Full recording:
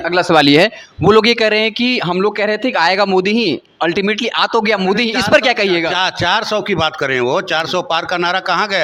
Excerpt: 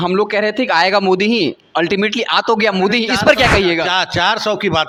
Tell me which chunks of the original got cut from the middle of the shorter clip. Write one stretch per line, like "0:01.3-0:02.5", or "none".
none